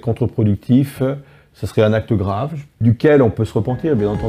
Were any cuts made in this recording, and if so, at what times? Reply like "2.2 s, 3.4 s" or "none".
2.8 s